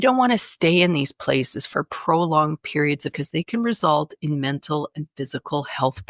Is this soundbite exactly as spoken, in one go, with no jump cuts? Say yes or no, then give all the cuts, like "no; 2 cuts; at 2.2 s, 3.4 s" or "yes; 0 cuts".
no; 1 cut; at 3.1 s